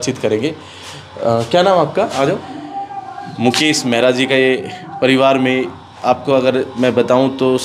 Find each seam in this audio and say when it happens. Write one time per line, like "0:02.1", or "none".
0:02.6